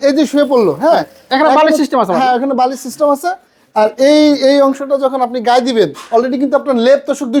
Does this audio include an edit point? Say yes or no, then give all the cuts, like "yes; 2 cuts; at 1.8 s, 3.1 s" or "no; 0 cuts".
no; 0 cuts